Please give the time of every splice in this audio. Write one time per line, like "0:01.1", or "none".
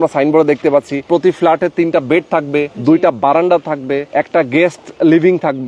0:01.1
0:02.7
0:04.1